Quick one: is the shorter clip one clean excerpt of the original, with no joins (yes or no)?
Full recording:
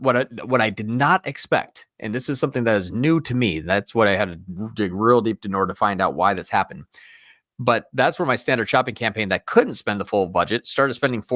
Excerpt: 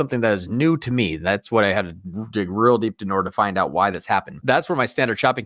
no